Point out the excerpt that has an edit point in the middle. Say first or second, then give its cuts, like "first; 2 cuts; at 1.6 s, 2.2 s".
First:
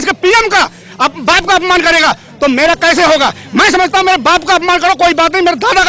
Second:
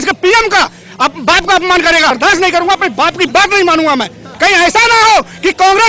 second; 2 cuts; at 2.2 s, 4.2 s